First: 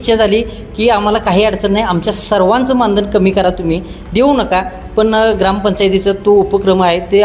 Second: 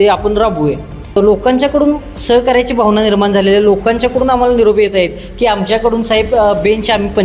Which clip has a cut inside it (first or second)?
second